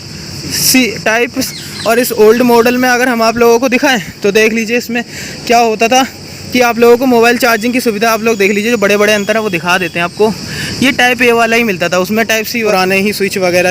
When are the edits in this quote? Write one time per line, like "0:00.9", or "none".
0:01.5
0:12.7